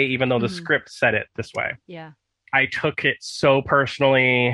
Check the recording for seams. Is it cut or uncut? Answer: cut